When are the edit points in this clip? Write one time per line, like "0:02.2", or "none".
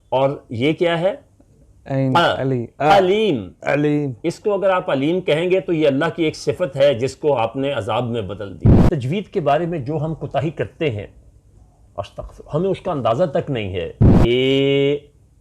0:08.7
0:14.1